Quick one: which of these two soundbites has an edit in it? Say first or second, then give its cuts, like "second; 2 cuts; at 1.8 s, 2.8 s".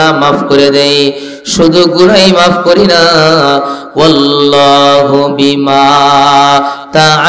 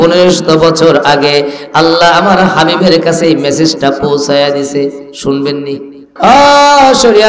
second; 1 cut; at 6.0 s